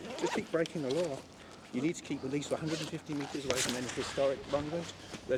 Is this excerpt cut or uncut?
uncut